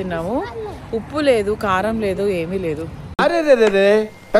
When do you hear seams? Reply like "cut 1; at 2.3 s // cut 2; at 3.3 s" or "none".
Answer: none